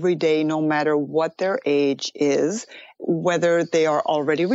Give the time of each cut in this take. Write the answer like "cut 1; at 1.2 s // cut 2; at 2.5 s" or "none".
none